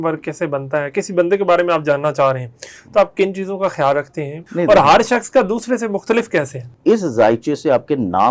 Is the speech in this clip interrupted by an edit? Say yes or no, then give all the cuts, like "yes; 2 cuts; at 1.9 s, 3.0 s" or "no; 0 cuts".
yes; 2 cuts; at 4.4 s, 6.6 s